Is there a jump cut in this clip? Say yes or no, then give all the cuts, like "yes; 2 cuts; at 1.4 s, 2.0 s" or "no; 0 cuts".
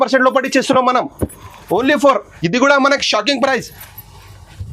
yes; 1 cut; at 2.3 s